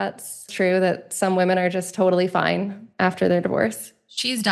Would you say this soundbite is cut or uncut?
uncut